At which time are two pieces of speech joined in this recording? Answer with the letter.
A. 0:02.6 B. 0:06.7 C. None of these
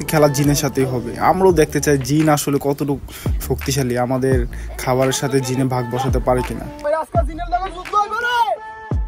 B